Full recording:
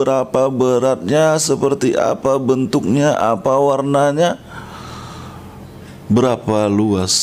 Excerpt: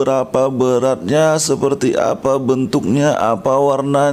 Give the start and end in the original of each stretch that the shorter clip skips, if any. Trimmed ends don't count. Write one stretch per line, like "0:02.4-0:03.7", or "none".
none

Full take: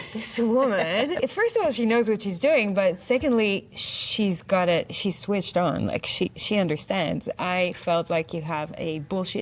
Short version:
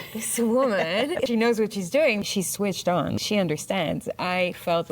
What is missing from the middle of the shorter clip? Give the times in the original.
0:01.3-0:01.8
0:02.7-0:04.9
0:05.9-0:06.4

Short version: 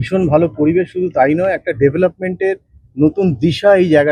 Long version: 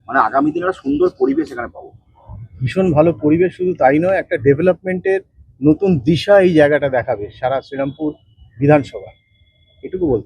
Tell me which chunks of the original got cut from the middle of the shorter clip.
none

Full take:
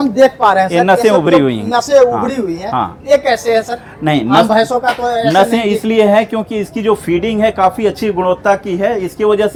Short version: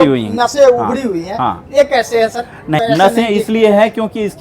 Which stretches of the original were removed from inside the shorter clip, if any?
0:04.1-0:05.1

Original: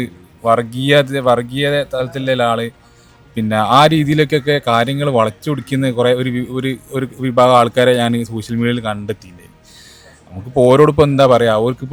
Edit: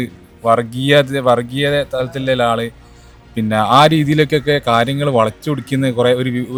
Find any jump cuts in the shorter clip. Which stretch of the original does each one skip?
none

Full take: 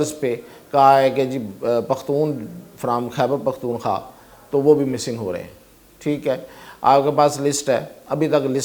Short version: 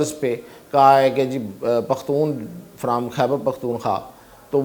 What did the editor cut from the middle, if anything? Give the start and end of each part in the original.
none

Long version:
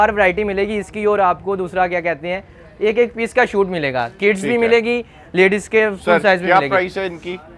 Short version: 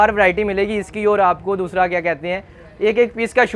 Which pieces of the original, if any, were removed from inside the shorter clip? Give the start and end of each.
none

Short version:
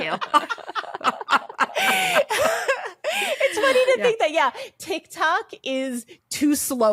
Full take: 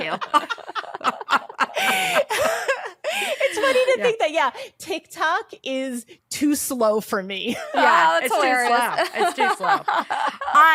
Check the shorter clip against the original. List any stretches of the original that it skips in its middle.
none

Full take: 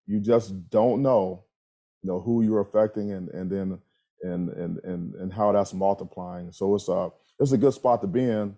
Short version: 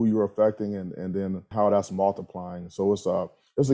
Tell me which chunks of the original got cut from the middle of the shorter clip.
0:03.8-0:05.3

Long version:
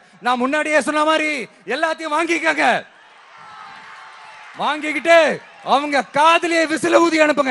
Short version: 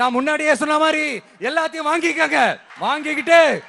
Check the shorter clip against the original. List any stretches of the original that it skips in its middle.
0:02.9-0:04.5

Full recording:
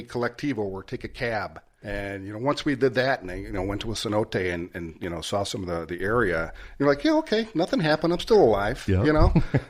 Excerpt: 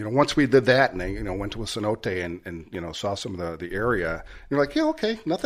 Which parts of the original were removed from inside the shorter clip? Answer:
none

